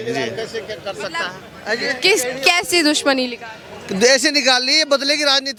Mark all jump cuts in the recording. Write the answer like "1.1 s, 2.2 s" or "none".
none

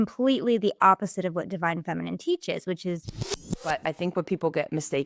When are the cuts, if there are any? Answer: 3.5 s

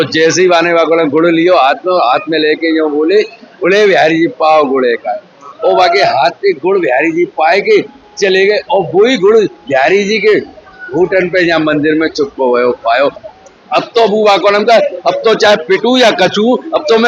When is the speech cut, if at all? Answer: 5.5 s, 13.2 s

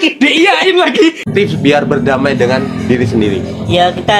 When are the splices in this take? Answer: 1.2 s

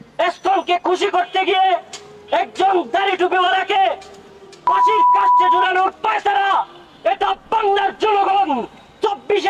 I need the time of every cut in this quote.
none

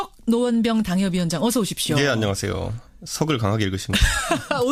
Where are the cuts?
none

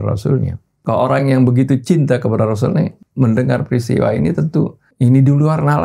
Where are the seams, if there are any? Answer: 3.0 s, 4.8 s

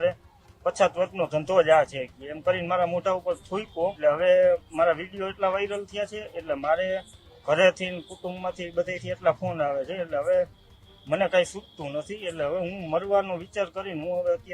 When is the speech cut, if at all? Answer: 4.0 s

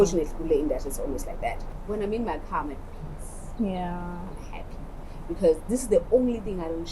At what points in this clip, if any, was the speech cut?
1.7 s

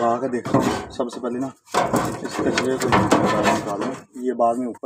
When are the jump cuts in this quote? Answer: none

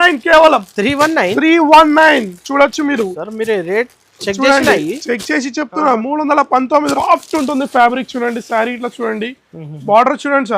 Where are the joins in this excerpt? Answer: 6.9 s

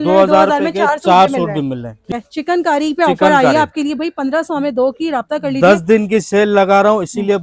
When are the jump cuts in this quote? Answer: 2.1 s

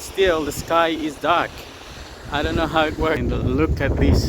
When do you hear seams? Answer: 3.2 s

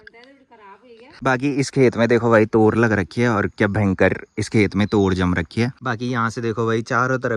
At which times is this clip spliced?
1.2 s, 5.7 s

